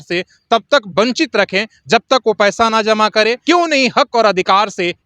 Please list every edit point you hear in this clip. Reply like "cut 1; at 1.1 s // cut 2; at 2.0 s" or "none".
cut 1; at 3.4 s

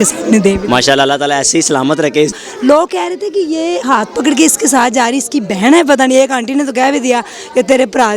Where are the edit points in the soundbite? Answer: cut 1; at 2.3 s

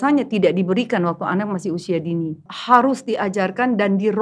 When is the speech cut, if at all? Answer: cut 1; at 2.5 s

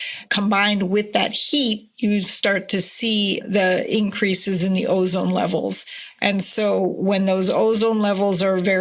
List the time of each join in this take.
none

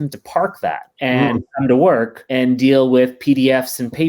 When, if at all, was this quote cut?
cut 1; at 0.9 s // cut 2; at 2.2 s

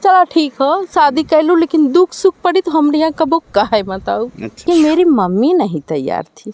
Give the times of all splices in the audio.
cut 1; at 4.6 s

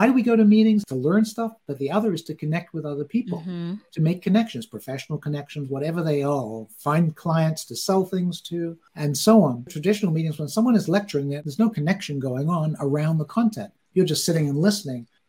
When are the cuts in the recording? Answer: cut 1; at 0.9 s // cut 2; at 9.7 s // cut 3; at 11.3 s

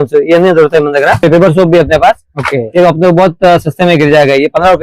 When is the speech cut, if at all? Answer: cut 1; at 1.2 s

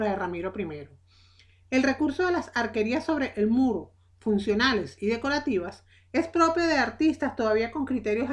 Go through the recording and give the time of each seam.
none

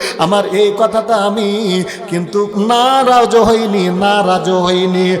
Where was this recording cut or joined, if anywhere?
cut 1; at 2.6 s

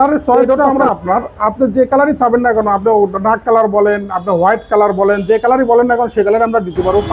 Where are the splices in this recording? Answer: none

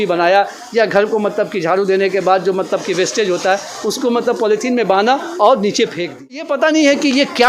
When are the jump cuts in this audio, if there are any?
cut 1; at 6.5 s

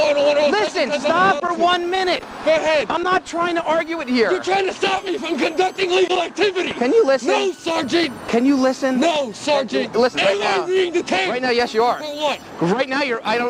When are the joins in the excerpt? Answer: cut 1; at 6.7 s // cut 2; at 10.2 s

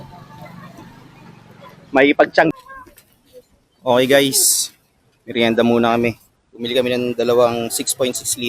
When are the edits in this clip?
cut 1; at 2.5 s

